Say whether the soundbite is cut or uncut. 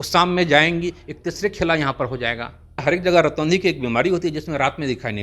cut